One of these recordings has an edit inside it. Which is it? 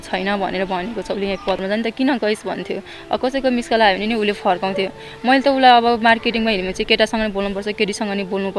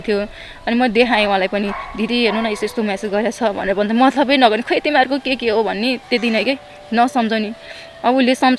first; 1 cut; at 1.6 s

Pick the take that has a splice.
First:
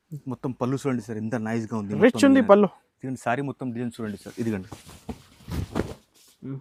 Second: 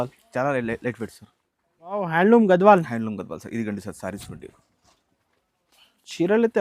second; 1 cut; at 2.1 s

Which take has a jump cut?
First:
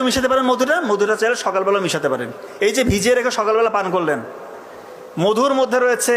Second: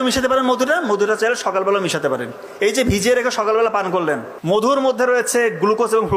second; 1 cut; at 4.7 s

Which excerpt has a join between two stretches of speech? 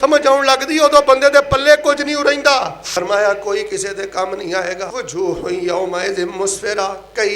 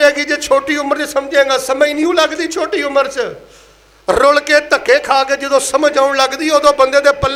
first; 2 cuts; at 2.8 s, 4.9 s

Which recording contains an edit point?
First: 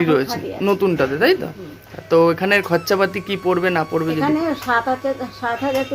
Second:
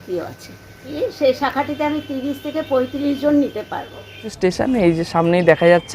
second; 2 cuts; at 0.9 s, 4.3 s

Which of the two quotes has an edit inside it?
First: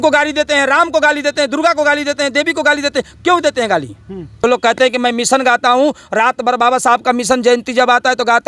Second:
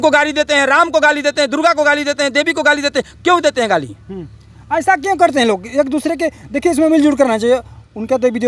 first; 1 cut; at 4.4 s

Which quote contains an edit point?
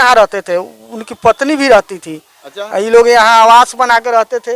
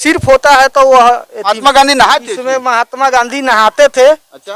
second; 1 cut; at 1.6 s

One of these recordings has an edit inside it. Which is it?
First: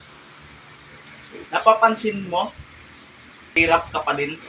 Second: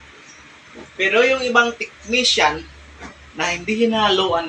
first; 1 cut; at 3.5 s

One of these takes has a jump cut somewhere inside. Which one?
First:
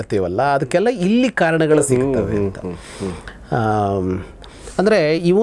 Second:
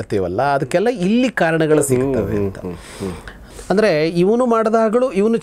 second; 1 cut; at 3.3 s

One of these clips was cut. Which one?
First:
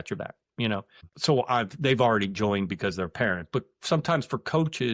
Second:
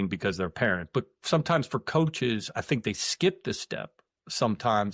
first; 1 cut; at 1.1 s

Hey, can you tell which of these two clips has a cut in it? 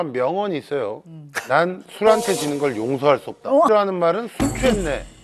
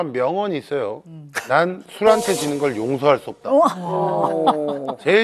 first; 1 cut; at 3.7 s

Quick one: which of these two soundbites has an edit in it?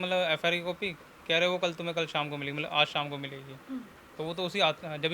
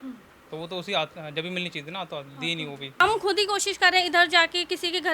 second; 1 cut; at 3.0 s

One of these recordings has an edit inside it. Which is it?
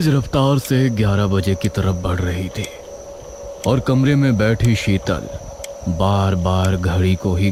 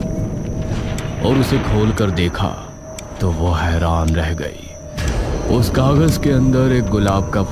second; 1 cut; at 1.2 s

